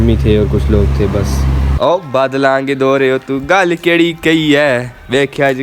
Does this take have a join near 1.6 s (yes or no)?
yes